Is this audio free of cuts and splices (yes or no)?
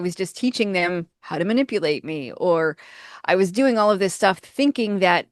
yes